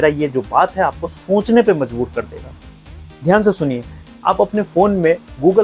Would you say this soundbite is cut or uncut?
uncut